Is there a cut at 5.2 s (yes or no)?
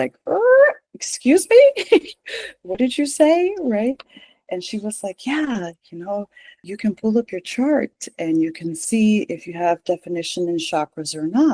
no